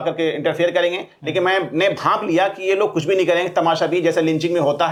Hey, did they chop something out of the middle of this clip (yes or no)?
no